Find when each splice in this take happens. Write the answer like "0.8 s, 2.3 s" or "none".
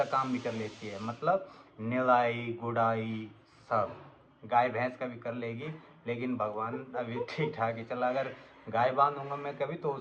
none